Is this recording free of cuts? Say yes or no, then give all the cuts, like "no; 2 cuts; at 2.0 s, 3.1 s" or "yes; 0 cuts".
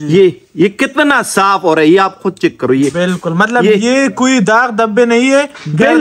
yes; 0 cuts